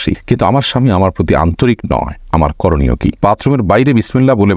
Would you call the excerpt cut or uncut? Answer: cut